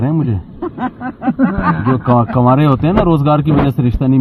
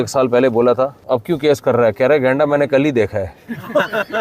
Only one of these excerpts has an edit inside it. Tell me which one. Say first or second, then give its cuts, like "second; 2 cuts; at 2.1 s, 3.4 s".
second; 1 cut; at 1.0 s